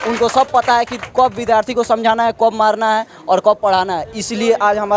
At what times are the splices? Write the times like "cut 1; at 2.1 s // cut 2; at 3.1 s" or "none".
none